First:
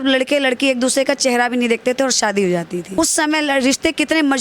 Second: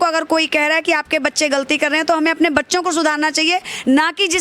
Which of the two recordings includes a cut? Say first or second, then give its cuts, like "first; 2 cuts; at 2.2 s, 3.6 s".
first; 1 cut; at 3.0 s